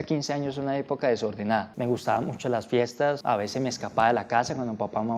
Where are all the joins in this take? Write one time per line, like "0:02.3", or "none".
0:01.7
0:03.2